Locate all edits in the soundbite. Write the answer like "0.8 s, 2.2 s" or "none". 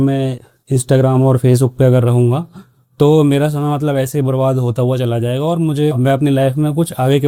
none